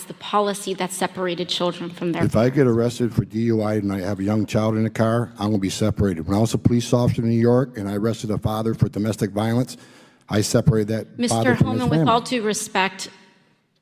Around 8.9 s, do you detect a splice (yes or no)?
yes